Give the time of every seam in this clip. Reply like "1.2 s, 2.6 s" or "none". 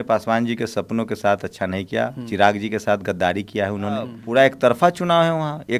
4.2 s